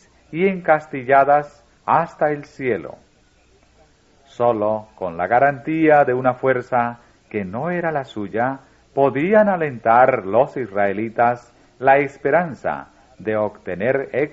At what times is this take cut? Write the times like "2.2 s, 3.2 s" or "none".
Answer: 5.5 s